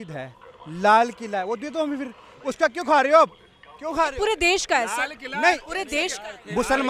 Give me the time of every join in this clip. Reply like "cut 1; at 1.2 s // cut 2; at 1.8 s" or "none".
none